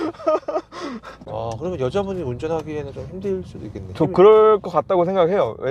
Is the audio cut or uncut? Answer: cut